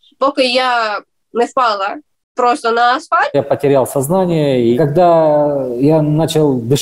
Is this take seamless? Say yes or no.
no